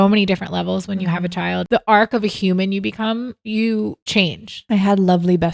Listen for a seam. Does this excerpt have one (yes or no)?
yes